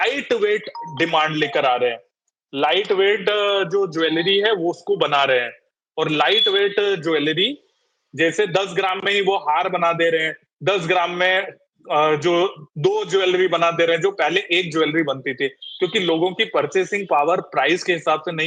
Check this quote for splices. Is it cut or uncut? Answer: uncut